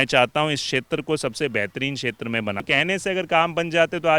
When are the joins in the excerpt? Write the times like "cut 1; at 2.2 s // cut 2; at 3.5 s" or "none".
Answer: cut 1; at 2.6 s